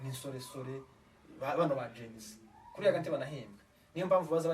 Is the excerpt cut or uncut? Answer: uncut